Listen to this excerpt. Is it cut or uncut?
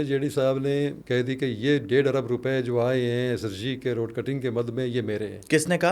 cut